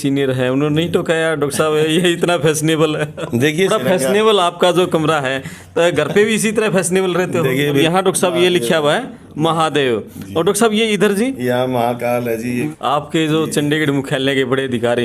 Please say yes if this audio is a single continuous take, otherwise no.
no